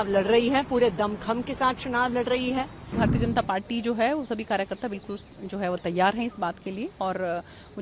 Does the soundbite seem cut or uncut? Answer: cut